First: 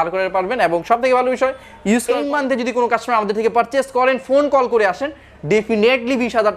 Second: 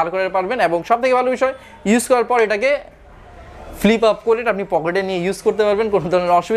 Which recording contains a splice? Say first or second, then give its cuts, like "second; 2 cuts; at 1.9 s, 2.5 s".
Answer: first; 1 cut; at 2.1 s